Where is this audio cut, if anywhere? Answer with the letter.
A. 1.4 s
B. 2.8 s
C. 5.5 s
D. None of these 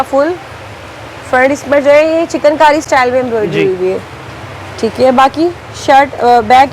D